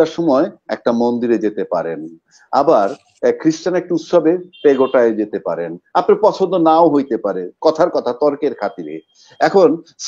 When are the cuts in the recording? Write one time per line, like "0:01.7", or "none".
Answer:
none